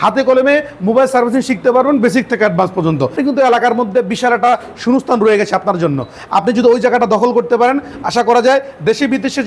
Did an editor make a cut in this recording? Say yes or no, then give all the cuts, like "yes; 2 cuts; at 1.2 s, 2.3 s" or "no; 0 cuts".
yes; 1 cut; at 3.1 s